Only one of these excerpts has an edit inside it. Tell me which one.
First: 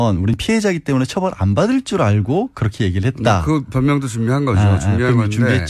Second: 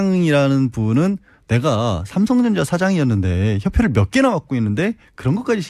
first; 1 cut; at 4.1 s

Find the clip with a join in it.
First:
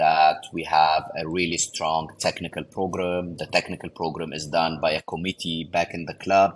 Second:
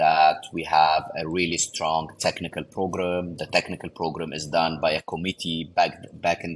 first; 1 cut; at 5.6 s

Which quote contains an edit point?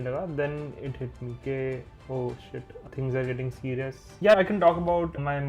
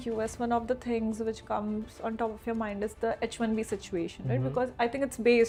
first; 2 cuts; at 2.9 s, 4.0 s

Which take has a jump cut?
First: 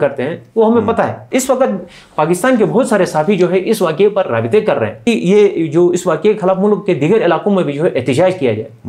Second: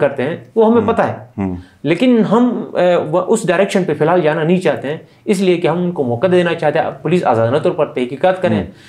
first; 2 cuts; at 1.2 s, 5.0 s

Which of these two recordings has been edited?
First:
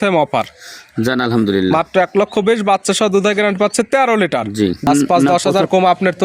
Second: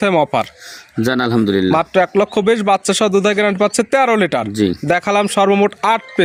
first; 1 cut; at 4.9 s

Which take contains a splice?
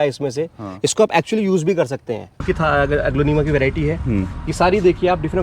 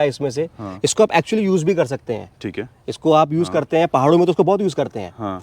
first; 1 cut; at 2.4 s

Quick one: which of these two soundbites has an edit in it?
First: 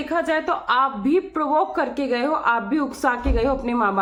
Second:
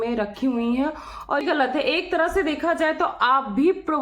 second; 1 cut; at 1.4 s

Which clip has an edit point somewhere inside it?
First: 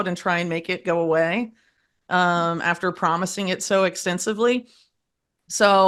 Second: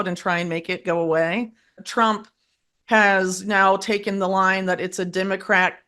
second; 1 cut; at 1.8 s

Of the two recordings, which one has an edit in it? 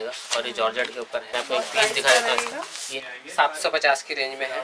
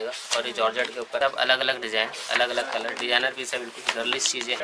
second; 1 cut; at 1.2 s

